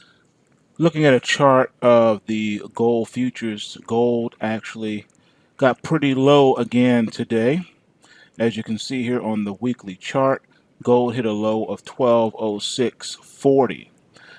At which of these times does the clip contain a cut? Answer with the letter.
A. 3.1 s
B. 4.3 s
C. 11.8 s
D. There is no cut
C